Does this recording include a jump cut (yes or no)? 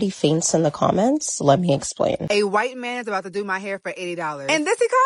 yes